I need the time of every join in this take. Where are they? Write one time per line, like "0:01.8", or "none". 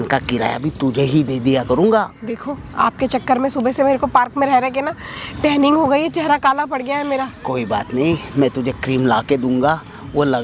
none